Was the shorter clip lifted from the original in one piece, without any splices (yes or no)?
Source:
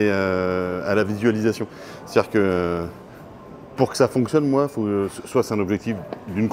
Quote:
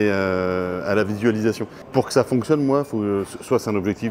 no